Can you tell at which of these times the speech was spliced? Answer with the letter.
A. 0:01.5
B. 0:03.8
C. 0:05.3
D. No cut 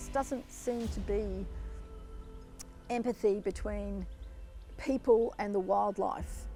D